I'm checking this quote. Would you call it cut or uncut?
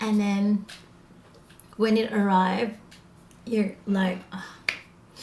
uncut